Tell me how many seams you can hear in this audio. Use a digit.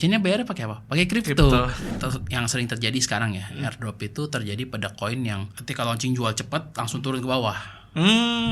2